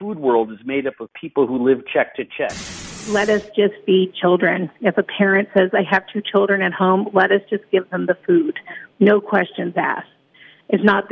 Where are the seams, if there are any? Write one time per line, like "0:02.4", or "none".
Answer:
0:03.0